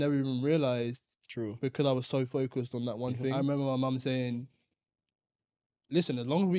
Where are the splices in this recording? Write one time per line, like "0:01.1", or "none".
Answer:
0:03.3